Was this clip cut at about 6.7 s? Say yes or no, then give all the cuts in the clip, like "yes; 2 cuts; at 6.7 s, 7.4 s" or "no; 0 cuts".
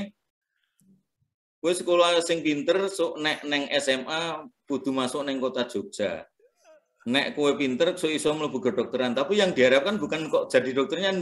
no; 0 cuts